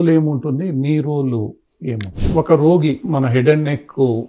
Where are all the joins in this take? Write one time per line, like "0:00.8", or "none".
0:02.2